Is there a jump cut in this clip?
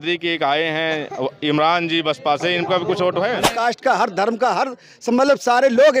yes; 1 cut; at 3.4 s

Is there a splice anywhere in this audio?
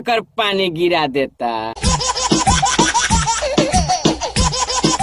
yes; 2 cuts; at 1.8 s, 4.0 s

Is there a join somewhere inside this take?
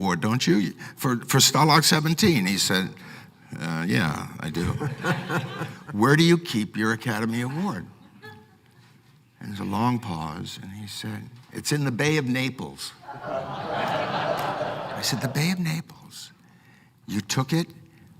yes; 1 cut; at 5.6 s

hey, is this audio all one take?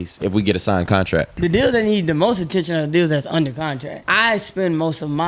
no; 2 cuts; at 1.3 s, 3.9 s

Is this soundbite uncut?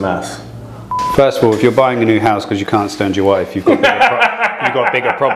no; 1 cut; at 0.9 s

